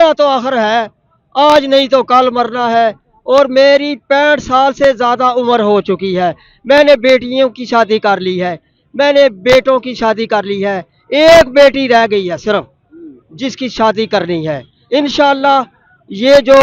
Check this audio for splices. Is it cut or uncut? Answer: uncut